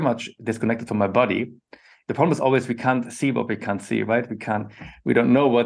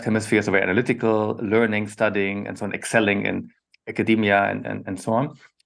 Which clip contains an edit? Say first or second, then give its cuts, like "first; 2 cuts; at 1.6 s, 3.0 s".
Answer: first; 1 cut; at 1.9 s